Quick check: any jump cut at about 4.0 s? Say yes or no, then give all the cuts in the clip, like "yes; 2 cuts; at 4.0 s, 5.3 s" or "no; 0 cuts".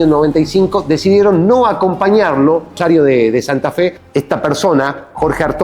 yes; 2 cuts; at 2.8 s, 4.0 s